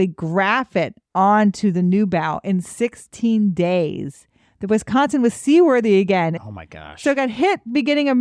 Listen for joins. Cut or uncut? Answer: cut